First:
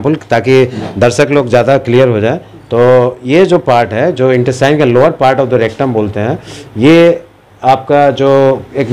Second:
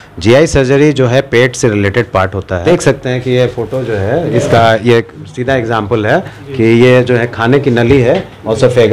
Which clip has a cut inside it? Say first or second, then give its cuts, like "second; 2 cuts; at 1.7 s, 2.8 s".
second; 1 cut; at 2.6 s